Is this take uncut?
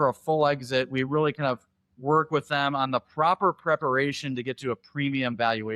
yes; 0 cuts

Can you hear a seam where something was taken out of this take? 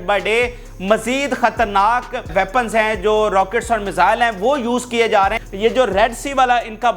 yes; 2 cuts; at 2.3 s, 5.5 s

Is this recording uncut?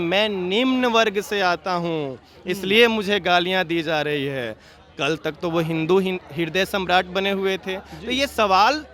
yes; 0 cuts

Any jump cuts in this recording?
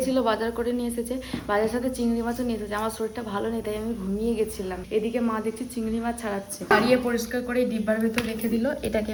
no; 0 cuts

